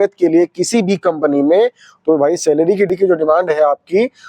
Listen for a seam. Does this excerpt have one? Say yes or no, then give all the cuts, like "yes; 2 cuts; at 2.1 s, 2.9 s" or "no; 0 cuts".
yes; 1 cut; at 2.9 s